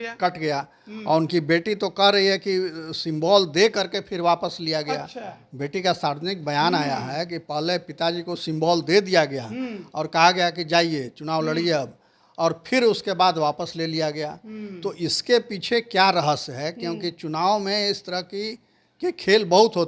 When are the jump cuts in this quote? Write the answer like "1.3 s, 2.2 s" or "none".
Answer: none